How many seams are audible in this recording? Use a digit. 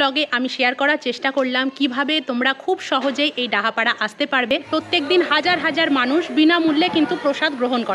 1